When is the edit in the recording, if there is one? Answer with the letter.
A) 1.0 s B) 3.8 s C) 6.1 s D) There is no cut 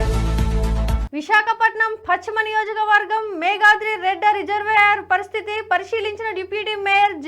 A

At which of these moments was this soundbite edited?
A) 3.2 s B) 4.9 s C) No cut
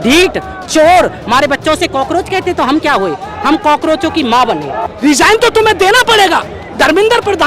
B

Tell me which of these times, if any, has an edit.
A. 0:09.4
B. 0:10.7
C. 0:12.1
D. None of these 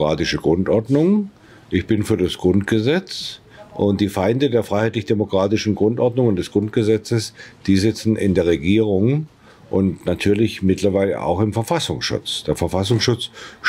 D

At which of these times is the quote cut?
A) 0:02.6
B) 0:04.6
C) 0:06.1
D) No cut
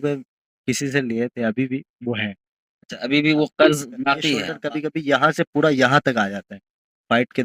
B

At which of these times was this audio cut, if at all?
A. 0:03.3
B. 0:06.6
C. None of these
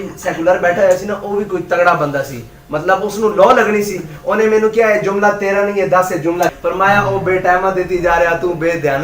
B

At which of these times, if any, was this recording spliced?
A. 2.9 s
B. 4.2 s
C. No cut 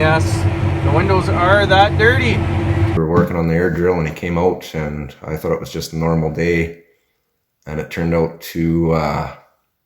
A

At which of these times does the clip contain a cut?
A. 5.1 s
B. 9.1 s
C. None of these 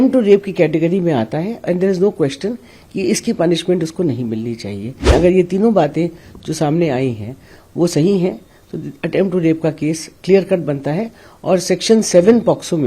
A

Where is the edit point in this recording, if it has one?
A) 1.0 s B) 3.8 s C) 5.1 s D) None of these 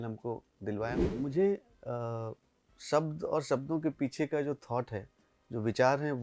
A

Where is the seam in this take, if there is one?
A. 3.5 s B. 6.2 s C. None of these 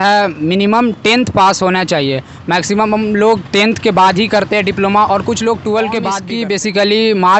B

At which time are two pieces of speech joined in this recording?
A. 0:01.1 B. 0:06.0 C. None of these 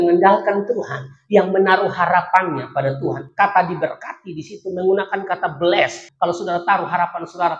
B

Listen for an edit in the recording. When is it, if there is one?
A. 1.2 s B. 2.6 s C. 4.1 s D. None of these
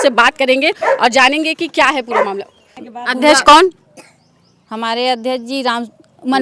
B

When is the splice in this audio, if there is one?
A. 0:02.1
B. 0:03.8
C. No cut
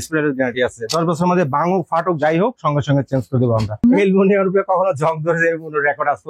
B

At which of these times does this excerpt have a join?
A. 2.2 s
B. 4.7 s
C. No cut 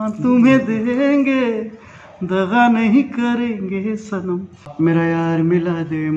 B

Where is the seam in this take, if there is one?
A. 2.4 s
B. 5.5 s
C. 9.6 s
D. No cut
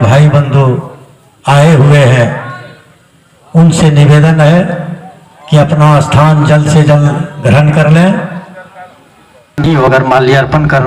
C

